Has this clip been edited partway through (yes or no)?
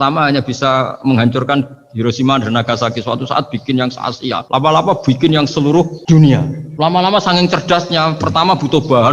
yes